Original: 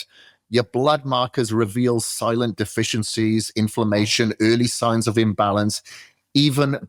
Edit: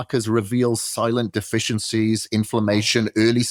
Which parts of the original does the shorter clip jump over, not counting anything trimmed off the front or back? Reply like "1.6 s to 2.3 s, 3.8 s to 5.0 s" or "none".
none